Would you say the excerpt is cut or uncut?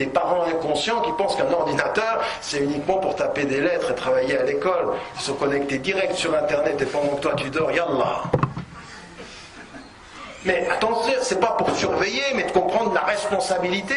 uncut